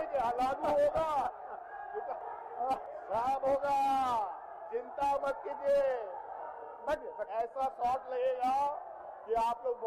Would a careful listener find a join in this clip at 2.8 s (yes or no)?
yes